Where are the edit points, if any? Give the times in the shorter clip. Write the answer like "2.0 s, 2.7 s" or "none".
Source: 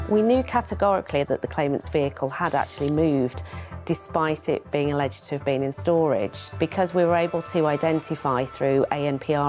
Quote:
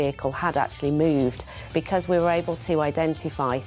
1.5 s